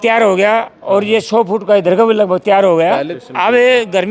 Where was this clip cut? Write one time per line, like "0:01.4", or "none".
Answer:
0:03.2